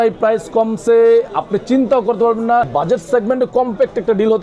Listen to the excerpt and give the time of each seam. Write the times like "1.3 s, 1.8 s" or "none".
2.7 s